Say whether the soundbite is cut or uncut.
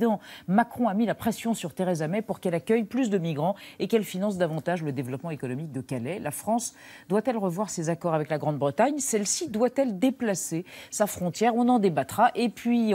cut